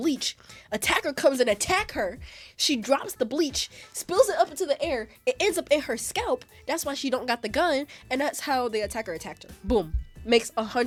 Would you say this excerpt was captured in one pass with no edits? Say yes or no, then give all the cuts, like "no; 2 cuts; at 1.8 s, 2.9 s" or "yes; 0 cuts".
yes; 0 cuts